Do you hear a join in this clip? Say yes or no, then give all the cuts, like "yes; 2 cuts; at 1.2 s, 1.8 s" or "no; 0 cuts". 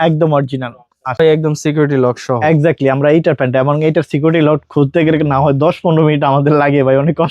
yes; 1 cut; at 1.2 s